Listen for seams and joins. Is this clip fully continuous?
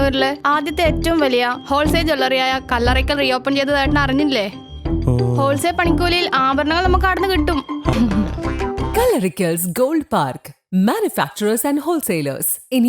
no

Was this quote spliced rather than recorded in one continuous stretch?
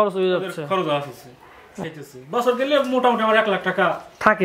yes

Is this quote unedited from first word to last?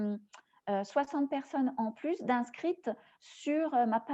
yes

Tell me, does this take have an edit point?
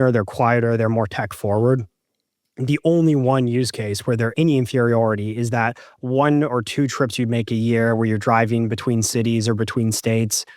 yes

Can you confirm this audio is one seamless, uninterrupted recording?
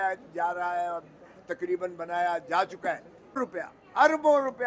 no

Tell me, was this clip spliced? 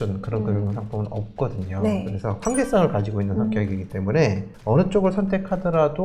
yes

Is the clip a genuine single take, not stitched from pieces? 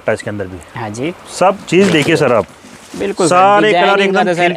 no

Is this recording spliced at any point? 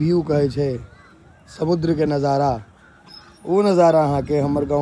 no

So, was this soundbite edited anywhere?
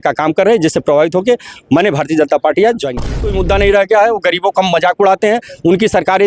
yes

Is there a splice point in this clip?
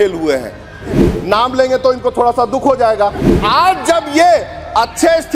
yes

